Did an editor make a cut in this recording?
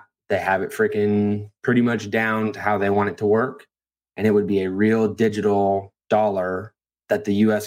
yes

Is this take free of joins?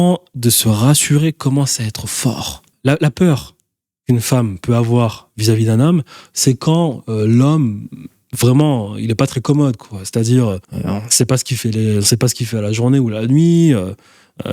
no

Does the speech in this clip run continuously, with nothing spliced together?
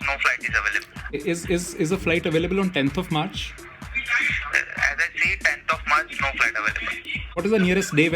no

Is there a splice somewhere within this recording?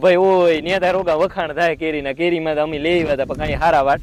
no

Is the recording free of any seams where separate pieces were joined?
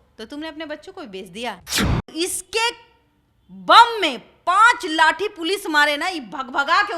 no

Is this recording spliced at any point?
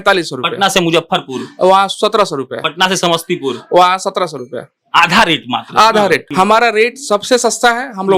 yes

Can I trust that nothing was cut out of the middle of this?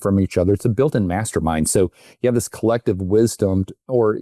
yes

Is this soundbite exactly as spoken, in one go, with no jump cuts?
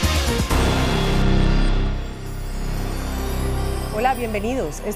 no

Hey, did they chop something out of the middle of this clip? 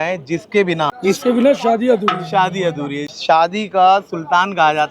yes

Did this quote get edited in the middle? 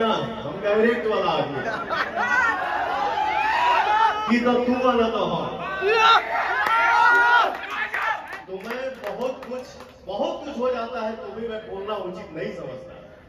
no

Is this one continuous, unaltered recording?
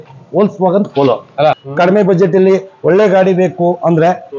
no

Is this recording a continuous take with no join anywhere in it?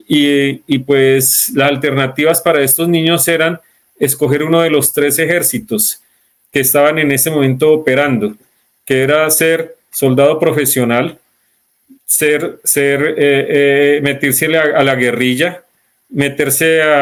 yes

